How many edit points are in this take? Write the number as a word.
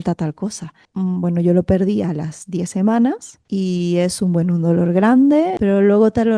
three